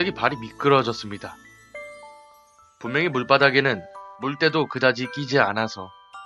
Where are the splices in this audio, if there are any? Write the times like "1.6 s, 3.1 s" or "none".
3.1 s